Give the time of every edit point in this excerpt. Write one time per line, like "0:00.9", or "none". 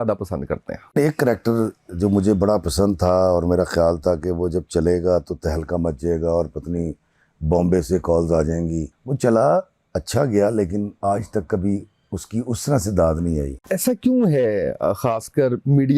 0:01.0
0:09.0
0:13.6